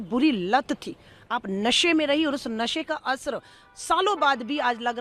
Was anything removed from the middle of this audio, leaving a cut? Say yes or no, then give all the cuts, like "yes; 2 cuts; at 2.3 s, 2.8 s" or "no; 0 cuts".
no; 0 cuts